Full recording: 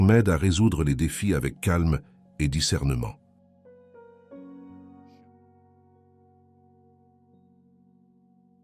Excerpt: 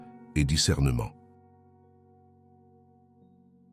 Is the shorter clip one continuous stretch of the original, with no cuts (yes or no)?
no